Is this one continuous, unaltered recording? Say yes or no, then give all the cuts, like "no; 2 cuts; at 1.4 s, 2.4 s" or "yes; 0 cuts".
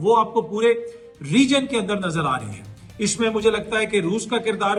yes; 0 cuts